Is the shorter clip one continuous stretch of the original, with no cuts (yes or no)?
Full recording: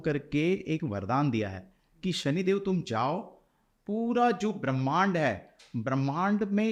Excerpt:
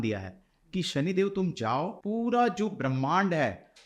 no